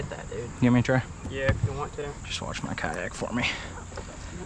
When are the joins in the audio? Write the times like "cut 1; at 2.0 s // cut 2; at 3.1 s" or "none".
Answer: cut 1; at 2.2 s